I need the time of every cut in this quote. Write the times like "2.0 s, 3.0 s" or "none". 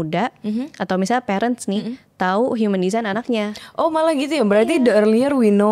none